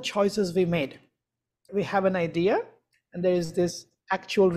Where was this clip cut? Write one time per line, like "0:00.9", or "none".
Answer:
0:01.7